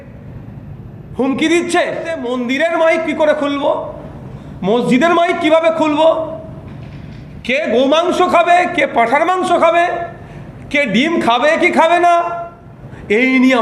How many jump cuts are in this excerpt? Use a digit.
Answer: 1